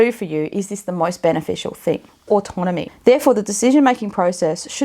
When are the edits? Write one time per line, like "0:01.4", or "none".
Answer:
0:02.4